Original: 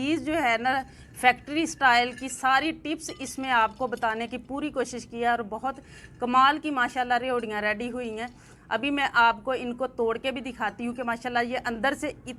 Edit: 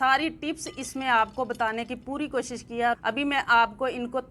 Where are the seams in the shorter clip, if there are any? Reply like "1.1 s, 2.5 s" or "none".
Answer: 3.0 s